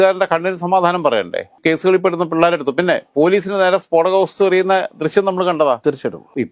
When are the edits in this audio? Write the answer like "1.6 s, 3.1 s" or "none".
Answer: none